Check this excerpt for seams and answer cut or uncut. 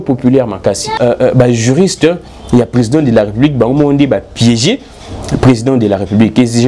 cut